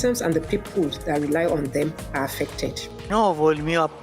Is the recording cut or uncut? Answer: uncut